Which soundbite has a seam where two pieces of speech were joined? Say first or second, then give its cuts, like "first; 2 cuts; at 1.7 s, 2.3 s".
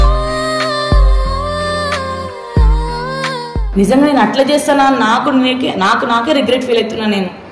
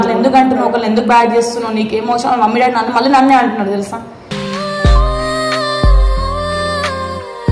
first; 1 cut; at 3.6 s